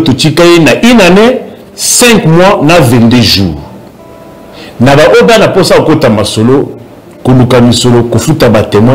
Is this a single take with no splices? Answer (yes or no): yes